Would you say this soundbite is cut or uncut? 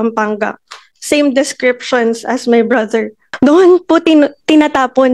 cut